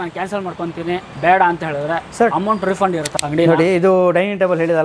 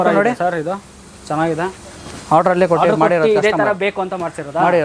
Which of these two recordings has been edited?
first; 2 cuts; at 1.1 s, 3.1 s

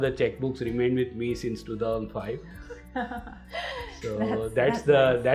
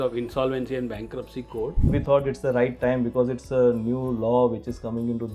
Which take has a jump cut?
second; 1 cut; at 1.9 s

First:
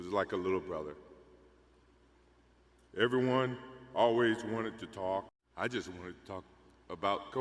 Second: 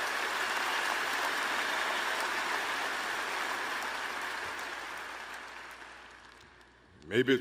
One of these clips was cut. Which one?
first; 1 cut; at 5.4 s

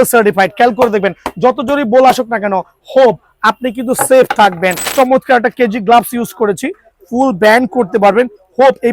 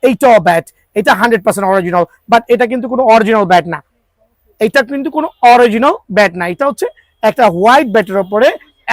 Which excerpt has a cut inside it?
first; 1 cut; at 4.8 s

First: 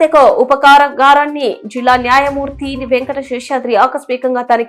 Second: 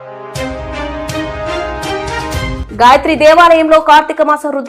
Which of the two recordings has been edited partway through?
second; 1 cut; at 2.6 s

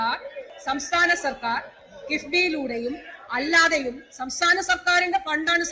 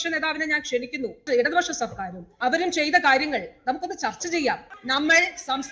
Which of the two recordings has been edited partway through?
second; 3 cuts; at 1.2 s, 2.3 s, 4.6 s

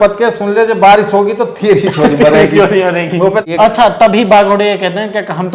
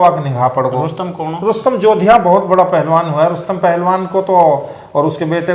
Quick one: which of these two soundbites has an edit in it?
first; 1 cut; at 3.5 s

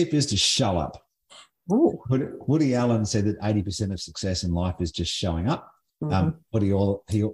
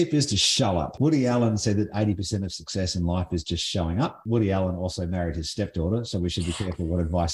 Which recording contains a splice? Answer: second; 2 cuts; at 0.9 s, 4.2 s

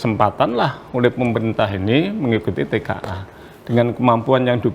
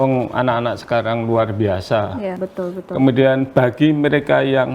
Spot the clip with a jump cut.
second; 1 cut; at 2.4 s

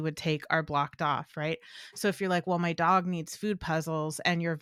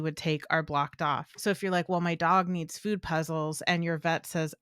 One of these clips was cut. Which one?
second; 1 cut; at 1.3 s

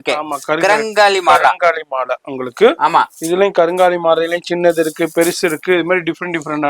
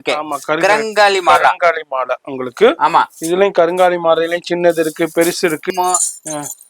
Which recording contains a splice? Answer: second; 1 cut; at 5.7 s

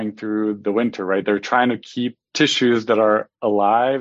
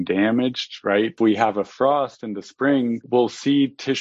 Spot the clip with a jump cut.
second; 2 cuts; at 1.1 s, 3.0 s

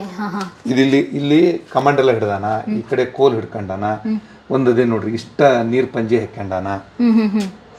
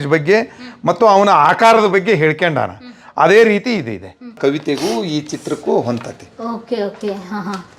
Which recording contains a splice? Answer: second; 1 cut; at 4.4 s

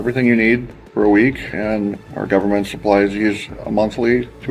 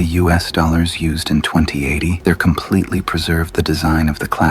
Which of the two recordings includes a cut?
second; 1 cut; at 2.1 s

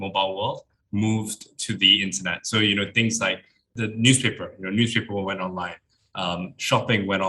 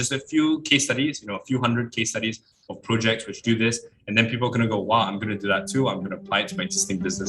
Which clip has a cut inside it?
first; 1 cut; at 3.7 s

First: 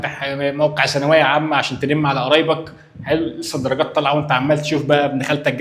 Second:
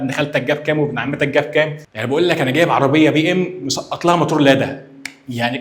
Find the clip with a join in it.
second; 1 cut; at 1.9 s

